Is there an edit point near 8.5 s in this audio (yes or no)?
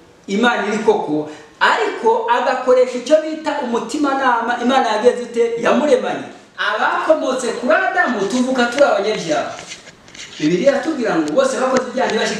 no